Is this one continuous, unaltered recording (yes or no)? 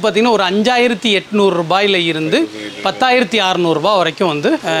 yes